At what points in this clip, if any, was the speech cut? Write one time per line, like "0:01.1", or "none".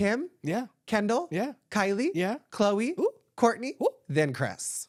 none